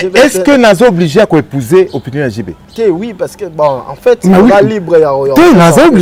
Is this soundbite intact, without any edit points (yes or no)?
yes